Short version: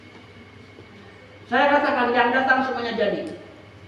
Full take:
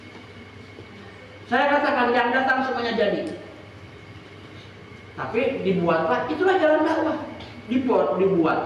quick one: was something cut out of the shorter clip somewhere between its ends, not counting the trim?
no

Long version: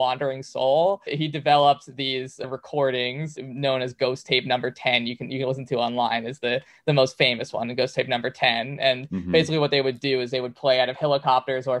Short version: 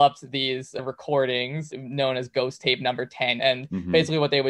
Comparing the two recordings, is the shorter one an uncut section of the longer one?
no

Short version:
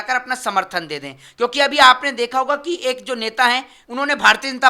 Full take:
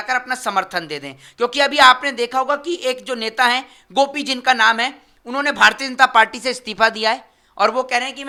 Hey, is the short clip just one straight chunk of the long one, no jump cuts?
no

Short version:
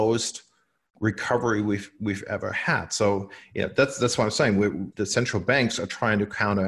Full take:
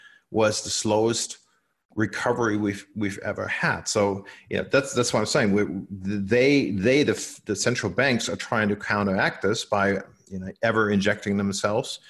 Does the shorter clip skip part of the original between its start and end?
yes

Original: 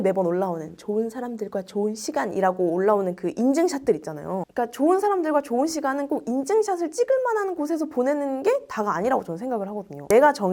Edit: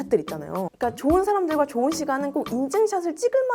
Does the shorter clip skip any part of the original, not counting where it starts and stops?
no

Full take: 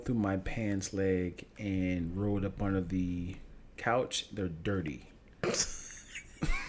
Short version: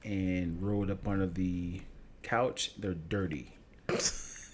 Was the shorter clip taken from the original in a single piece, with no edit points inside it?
yes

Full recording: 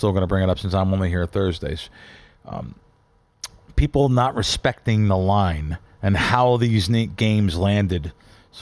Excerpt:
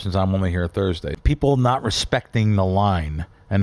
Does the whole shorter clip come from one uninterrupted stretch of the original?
no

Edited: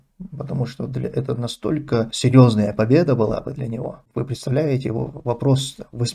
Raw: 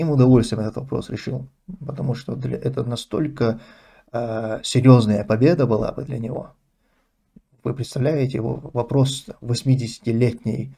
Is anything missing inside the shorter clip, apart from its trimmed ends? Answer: yes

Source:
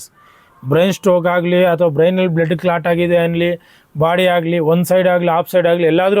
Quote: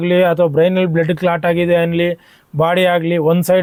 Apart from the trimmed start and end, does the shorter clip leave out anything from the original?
no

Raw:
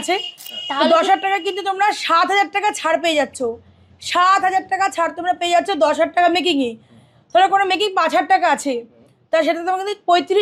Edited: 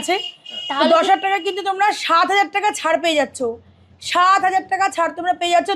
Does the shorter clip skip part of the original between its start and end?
no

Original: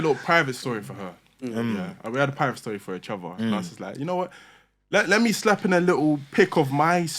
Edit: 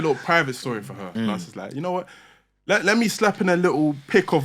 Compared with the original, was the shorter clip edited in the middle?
yes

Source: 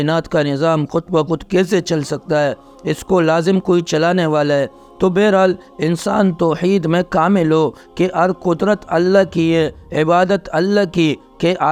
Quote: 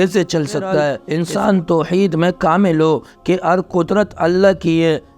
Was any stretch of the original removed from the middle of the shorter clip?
yes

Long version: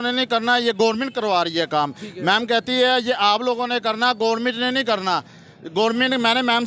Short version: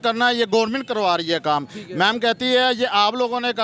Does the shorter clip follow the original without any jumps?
yes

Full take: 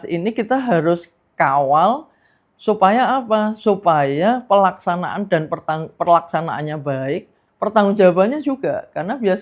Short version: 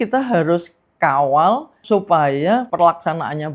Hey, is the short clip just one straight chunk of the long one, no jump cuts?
no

